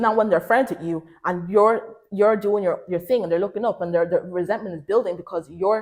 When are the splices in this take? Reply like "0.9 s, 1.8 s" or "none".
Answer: none